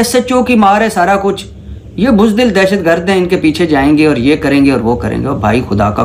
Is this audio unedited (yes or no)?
yes